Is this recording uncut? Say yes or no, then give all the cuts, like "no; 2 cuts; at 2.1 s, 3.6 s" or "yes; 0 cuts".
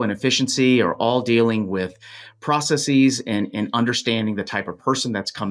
yes; 0 cuts